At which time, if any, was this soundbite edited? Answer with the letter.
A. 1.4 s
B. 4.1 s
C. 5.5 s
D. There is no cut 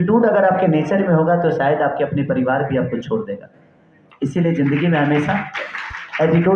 D